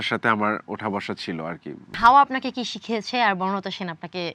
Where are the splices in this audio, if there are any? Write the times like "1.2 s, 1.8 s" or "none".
1.9 s